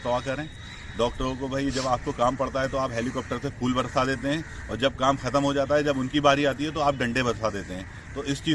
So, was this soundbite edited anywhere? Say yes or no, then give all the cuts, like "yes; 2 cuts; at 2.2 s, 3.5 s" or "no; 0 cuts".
no; 0 cuts